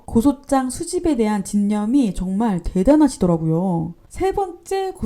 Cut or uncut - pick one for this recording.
cut